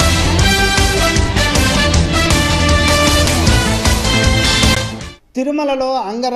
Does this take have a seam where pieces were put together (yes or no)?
no